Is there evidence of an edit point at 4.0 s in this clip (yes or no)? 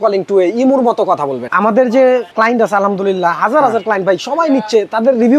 no